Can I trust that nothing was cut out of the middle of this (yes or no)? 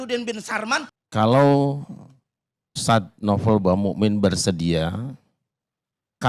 no